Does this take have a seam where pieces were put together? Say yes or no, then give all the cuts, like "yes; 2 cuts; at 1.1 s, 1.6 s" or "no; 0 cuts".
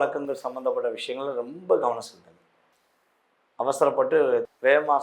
no; 0 cuts